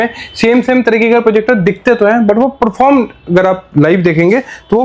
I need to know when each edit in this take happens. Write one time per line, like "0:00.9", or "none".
none